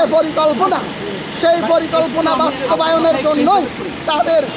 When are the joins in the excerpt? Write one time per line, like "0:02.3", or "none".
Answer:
none